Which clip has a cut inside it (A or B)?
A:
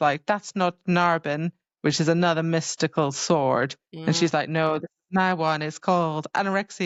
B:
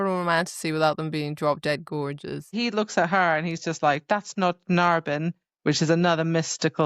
B